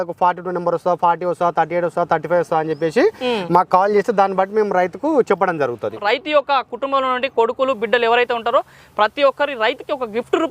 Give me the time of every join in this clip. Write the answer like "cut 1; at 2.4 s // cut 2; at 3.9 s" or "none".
cut 1; at 6.0 s